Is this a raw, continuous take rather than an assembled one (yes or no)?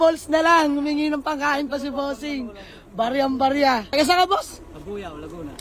no